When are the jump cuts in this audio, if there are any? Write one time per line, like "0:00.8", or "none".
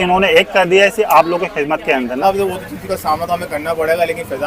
0:02.2